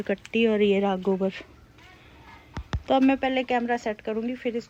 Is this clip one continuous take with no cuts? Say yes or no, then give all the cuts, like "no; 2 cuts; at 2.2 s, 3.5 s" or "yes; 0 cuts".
yes; 0 cuts